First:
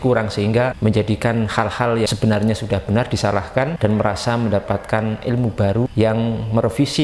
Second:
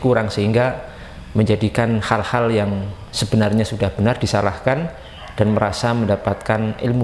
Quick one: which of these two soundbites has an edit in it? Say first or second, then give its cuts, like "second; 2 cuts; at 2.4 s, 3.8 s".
first; 4 cuts; at 0.8 s, 2.1 s, 3.7 s, 5.9 s